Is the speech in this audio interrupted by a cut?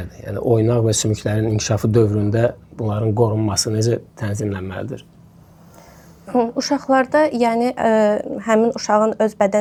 no; 0 cuts

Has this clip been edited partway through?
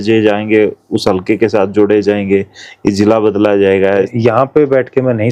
yes; 1 cut; at 4.1 s

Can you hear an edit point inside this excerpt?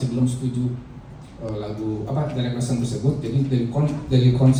no; 0 cuts

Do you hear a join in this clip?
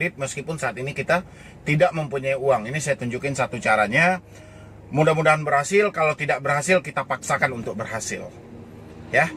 no; 0 cuts

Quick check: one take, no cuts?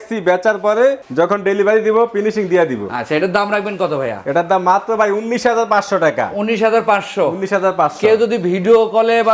yes; 0 cuts

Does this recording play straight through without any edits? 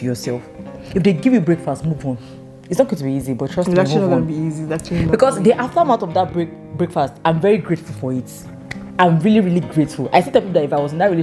yes; 0 cuts

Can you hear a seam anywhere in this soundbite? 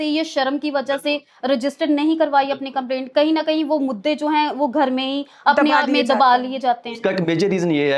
no; 0 cuts

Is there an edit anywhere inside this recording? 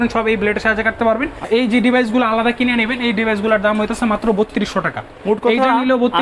yes; 1 cut; at 1.4 s

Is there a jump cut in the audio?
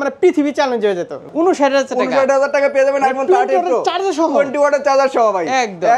yes; 1 cut; at 1.3 s

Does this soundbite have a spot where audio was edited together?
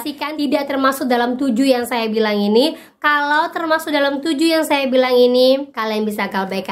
yes; 1 cut; at 5.7 s

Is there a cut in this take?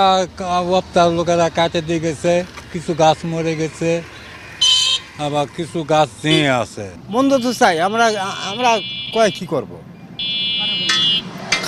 no; 0 cuts

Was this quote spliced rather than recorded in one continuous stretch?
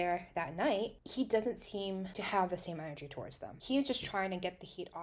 yes; 1 cut; at 3.6 s

